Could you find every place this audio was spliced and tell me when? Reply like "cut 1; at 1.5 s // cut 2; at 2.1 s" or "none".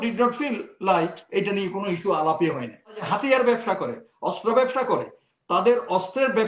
cut 1; at 3.0 s